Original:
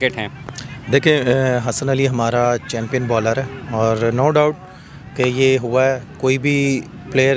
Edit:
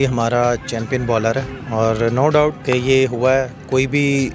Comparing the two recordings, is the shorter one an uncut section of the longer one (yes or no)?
no